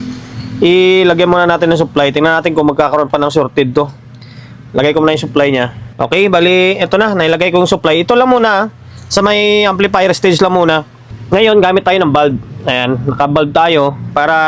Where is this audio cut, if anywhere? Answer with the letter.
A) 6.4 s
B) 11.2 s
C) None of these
B